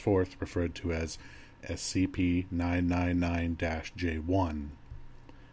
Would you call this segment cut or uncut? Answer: cut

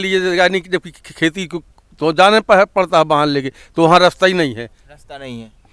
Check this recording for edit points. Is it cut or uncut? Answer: uncut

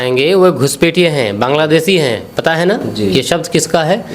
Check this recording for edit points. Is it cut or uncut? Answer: uncut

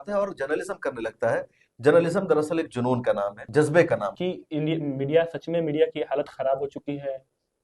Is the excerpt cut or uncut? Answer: cut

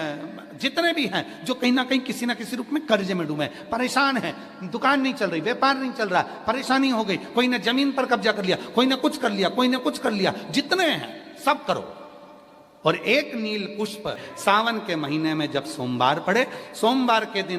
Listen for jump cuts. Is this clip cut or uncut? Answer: cut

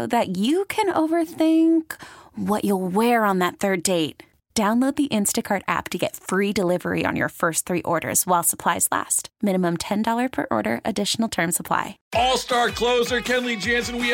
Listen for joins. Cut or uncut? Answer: cut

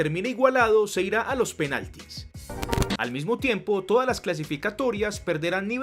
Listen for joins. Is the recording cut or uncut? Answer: cut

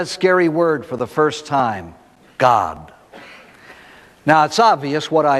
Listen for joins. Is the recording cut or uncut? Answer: cut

